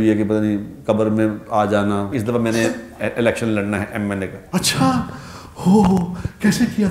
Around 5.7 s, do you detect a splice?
no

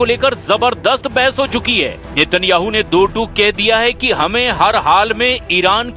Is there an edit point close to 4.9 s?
no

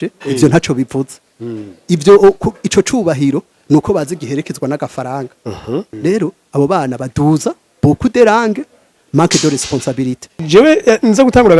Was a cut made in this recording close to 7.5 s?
no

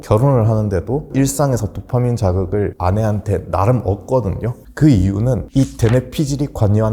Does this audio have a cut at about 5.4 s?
yes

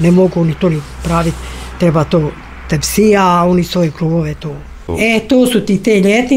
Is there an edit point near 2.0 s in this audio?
no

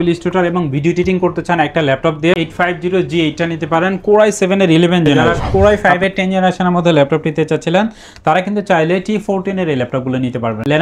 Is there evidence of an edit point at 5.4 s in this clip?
yes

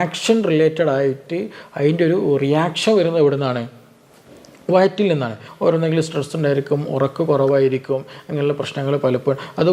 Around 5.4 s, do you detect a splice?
yes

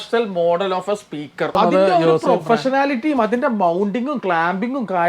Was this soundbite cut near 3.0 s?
no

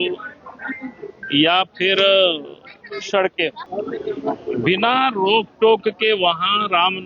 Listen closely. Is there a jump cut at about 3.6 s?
yes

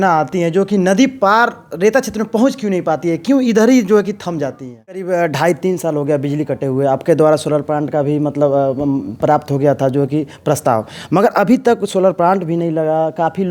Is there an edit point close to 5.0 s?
yes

